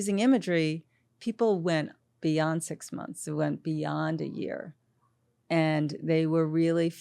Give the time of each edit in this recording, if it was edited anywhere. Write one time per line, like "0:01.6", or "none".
none